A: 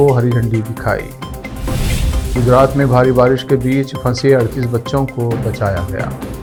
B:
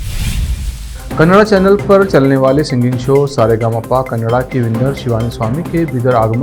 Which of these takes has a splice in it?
B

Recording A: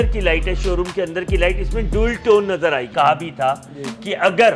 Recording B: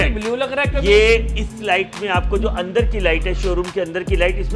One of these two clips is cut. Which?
A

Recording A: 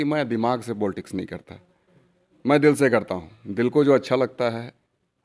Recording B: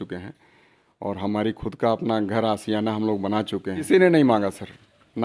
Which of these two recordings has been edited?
B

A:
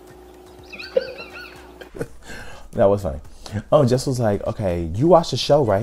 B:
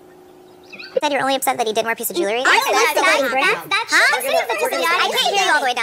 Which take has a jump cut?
B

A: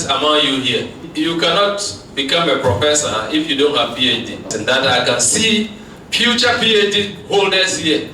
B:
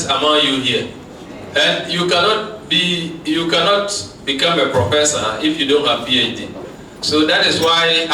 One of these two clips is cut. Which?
A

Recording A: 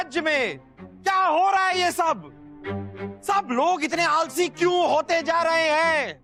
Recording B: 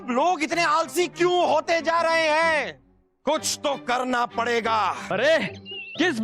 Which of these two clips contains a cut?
B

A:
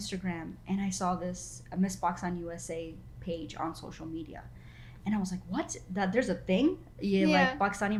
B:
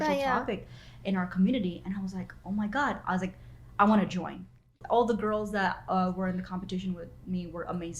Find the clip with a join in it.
B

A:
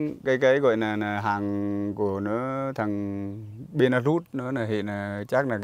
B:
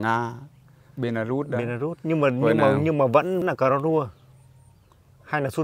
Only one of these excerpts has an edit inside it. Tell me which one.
B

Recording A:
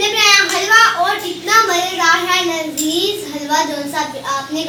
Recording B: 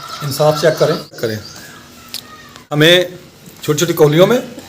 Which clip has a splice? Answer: B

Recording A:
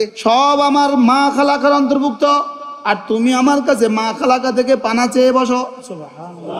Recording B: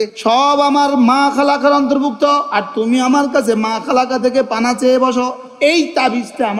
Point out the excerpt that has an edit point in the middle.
B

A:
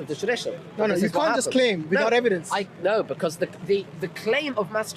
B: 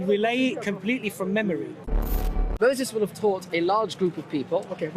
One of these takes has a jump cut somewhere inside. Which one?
B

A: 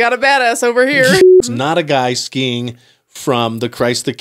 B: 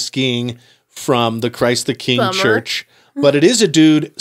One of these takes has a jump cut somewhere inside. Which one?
A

